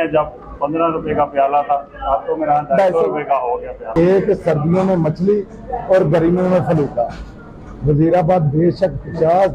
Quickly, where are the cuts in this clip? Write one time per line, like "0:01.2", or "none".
0:03.8